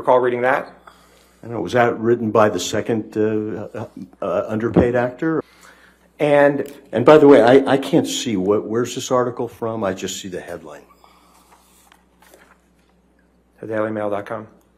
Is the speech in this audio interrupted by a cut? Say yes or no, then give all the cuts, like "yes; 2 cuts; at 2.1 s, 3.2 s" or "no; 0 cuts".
yes; 1 cut; at 5.4 s